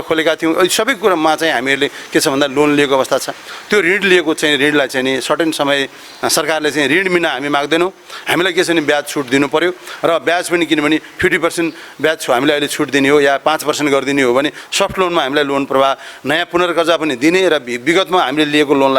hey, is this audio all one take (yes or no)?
yes